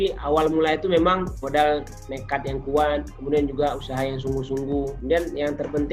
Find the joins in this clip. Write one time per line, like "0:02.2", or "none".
0:01.4
0:05.0

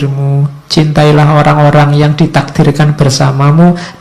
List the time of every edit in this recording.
none

